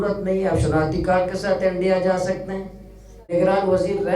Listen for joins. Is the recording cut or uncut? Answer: cut